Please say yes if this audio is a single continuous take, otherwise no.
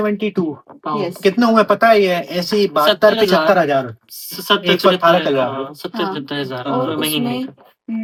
yes